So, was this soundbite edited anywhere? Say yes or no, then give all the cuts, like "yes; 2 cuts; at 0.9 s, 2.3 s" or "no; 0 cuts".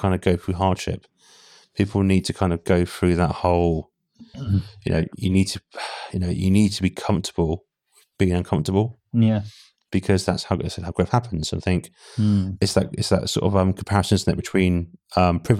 no; 0 cuts